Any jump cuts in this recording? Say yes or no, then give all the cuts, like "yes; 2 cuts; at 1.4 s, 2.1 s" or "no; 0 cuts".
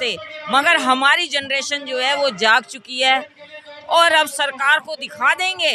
no; 0 cuts